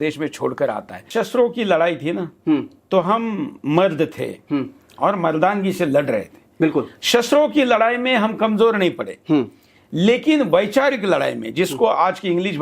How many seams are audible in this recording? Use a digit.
1